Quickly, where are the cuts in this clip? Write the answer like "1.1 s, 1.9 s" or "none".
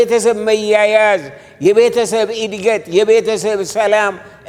none